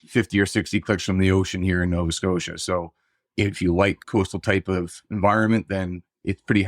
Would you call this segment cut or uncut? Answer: cut